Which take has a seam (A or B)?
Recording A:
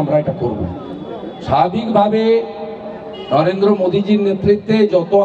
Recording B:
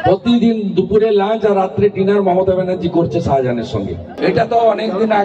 B